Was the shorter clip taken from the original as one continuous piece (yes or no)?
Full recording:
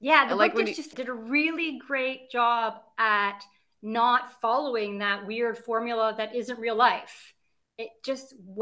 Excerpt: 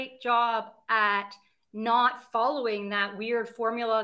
yes